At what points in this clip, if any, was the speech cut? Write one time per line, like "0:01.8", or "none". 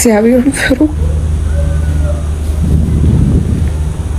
none